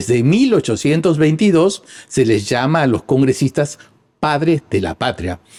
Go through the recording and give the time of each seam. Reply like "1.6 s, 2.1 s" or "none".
none